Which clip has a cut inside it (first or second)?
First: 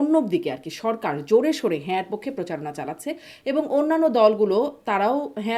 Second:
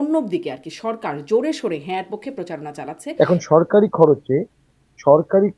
second